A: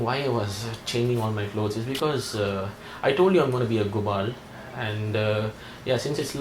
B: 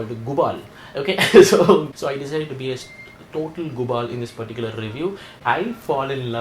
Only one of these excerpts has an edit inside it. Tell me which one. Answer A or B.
B